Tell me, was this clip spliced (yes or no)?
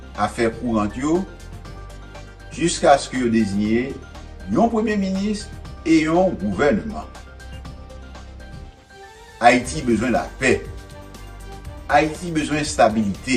no